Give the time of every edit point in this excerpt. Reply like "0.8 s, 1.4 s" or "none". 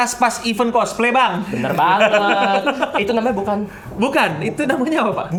none